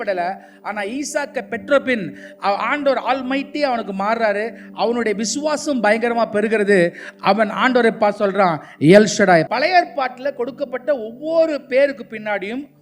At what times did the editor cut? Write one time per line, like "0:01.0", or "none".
0:09.5